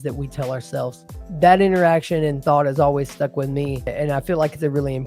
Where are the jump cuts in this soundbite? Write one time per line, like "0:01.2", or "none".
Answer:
0:01.2
0:03.9